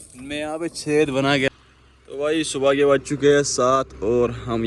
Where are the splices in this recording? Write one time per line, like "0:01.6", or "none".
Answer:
0:01.5